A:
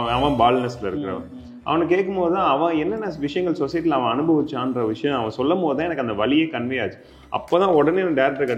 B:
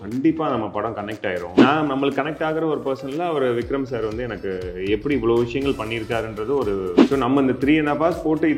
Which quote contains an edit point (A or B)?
B